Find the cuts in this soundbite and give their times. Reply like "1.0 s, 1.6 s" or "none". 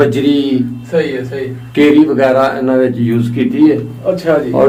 none